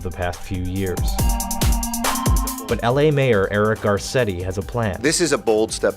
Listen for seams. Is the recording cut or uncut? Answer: cut